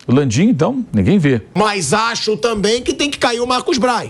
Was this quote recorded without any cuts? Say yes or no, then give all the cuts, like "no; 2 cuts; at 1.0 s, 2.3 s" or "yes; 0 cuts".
no; 1 cut; at 1.5 s